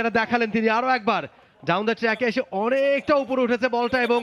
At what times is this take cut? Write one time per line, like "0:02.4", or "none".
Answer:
none